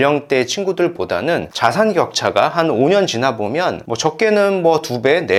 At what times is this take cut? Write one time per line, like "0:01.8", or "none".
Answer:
none